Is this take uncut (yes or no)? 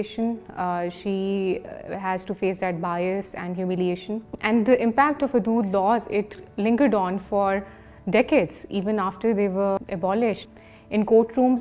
no